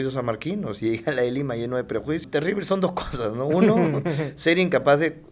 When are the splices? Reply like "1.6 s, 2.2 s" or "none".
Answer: 2.3 s

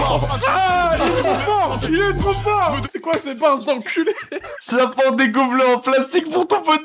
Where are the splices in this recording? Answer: 2.8 s, 4.4 s

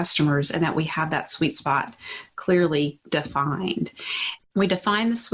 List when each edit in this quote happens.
4.3 s

